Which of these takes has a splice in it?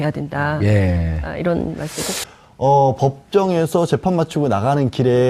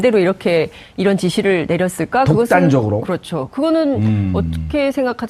second; 1 cut; at 4.3 s

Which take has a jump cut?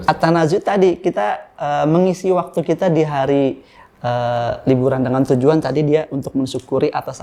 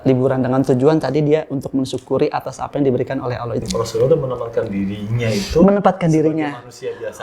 second; 1 cut; at 3.6 s

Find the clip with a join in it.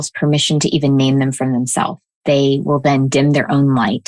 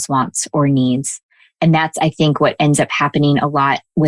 first; 1 cut; at 2.1 s

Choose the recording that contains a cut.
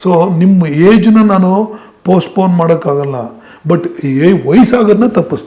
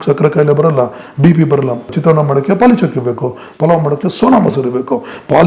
second; 1 cut; at 1.9 s

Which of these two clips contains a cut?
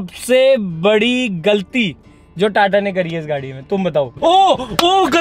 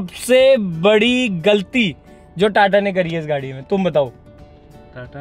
first; 1 cut; at 4.1 s

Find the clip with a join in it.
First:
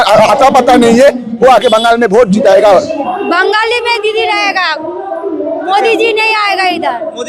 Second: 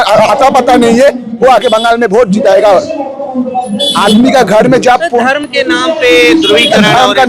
first; 1 cut; at 3.0 s

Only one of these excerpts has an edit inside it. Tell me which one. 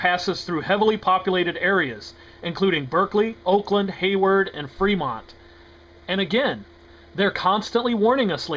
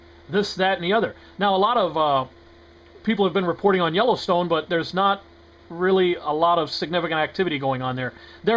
second; 1 cut; at 4.1 s

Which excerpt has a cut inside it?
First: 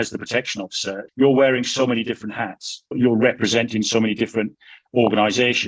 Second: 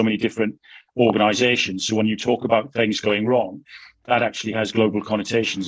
first; 2 cuts; at 1.0 s, 2.9 s

